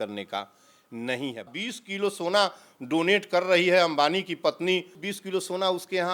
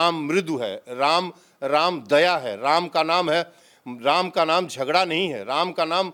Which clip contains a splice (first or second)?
first